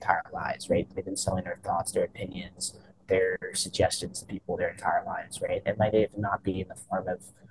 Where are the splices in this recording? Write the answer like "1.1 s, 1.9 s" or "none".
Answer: none